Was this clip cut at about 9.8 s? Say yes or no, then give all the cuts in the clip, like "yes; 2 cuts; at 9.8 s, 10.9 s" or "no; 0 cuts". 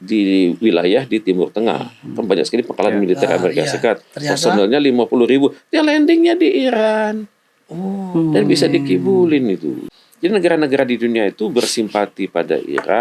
yes; 1 cut; at 9.8 s